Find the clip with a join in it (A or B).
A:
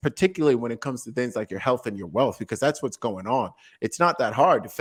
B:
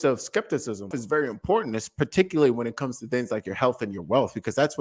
B